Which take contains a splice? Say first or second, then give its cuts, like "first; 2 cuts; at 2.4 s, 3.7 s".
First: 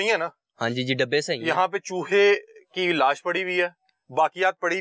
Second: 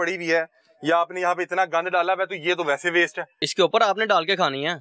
second; 1 cut; at 3.4 s